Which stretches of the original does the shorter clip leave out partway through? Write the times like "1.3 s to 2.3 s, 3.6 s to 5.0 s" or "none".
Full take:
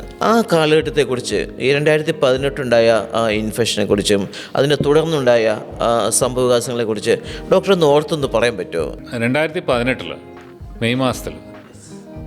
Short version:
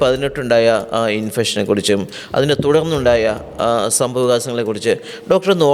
none